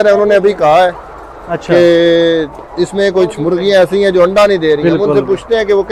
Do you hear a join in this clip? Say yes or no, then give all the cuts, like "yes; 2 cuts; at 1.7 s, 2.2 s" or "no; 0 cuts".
no; 0 cuts